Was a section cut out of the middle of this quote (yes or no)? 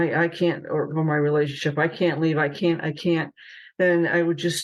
no